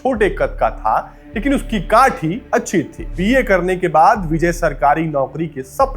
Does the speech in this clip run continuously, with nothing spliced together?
no; 1 cut; at 3.1 s

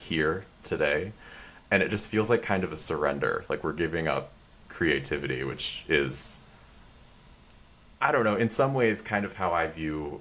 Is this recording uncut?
yes; 0 cuts

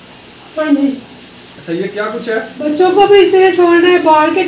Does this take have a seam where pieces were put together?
yes; 1 cut; at 2.5 s

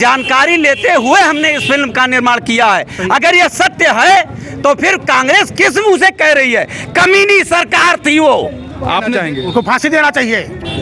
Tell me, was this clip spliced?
yes; 1 cut; at 9.1 s

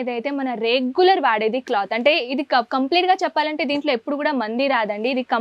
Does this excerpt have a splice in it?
no; 0 cuts

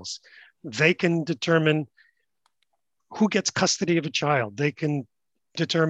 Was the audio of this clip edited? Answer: no; 0 cuts

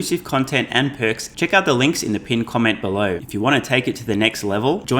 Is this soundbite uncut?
no; 2 cuts; at 1.3 s, 3.2 s

